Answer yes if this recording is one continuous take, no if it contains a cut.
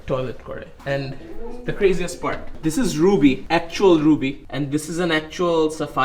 yes